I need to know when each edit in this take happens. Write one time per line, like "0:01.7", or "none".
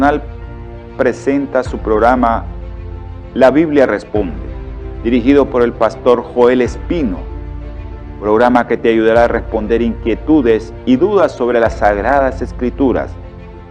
0:01.2